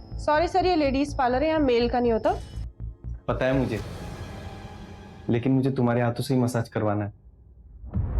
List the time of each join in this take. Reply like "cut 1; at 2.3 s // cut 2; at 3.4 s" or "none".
cut 1; at 2.5 s